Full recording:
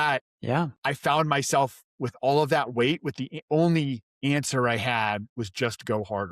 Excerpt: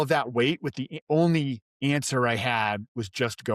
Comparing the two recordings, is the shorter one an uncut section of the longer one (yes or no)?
yes